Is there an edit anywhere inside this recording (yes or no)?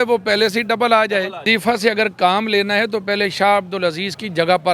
yes